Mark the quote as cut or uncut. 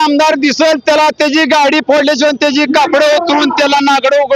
uncut